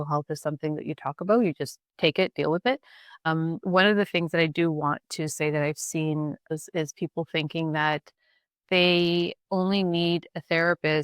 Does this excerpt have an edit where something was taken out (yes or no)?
yes